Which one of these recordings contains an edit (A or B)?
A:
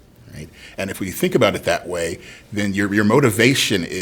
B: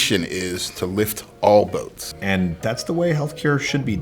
B